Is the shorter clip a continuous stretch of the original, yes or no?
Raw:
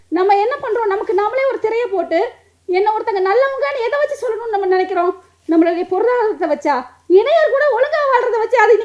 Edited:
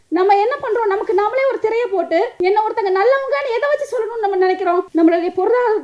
no